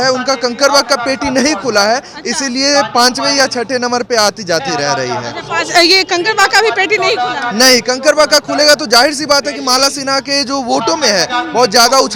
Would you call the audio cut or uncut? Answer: uncut